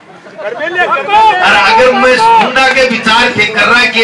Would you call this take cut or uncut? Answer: uncut